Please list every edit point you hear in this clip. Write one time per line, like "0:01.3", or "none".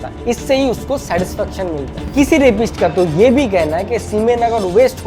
0:02.0